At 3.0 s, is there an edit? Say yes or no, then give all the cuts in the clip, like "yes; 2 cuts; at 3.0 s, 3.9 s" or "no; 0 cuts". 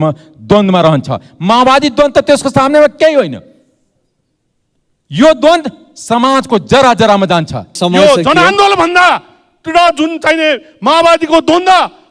no; 1 cut; at 7.8 s